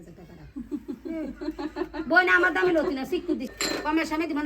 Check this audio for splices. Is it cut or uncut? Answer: cut